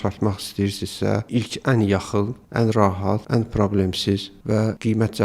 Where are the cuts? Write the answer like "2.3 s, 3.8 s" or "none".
2.4 s, 3.2 s, 4.5 s